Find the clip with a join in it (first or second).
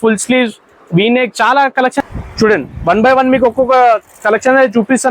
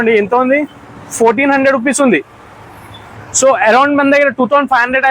first